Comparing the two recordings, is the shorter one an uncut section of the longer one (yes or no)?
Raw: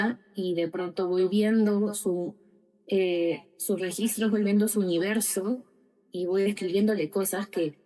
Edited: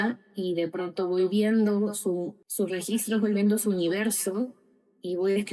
no